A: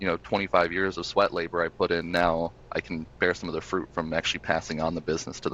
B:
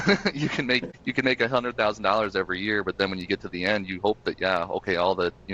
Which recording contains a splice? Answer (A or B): B